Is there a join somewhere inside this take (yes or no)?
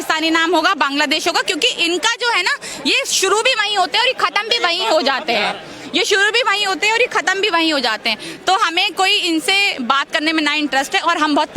no